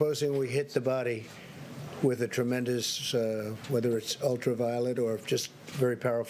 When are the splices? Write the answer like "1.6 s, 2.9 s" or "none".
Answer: none